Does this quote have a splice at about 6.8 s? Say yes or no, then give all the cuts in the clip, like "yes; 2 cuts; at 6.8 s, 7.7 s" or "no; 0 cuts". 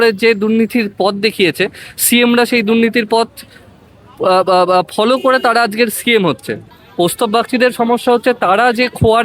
yes; 1 cut; at 6.8 s